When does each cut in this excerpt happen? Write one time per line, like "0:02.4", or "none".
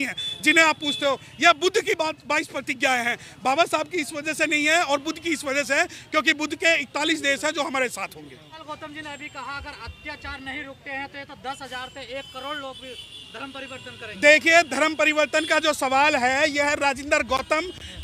0:08.6